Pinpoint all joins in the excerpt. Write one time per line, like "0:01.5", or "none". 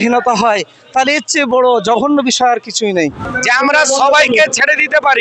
0:03.3